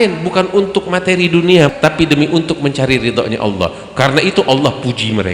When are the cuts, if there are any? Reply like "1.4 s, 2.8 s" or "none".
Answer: 1.7 s